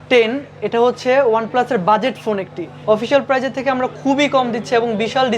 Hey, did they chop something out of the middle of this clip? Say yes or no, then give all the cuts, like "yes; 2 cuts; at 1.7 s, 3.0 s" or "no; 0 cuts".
yes; 1 cut; at 2.7 s